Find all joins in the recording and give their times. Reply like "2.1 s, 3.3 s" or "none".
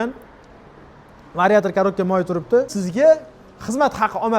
2.8 s